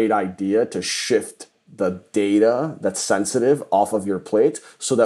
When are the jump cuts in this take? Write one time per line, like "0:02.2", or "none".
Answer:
none